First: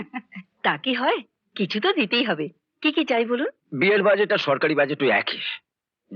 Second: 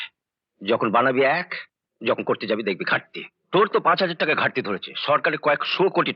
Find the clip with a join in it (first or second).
first